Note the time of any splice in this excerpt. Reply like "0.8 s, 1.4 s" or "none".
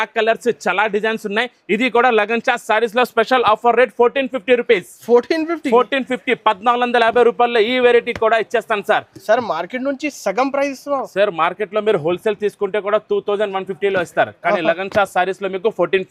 none